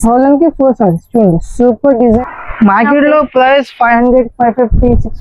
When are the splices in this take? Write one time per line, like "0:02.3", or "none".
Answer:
0:02.2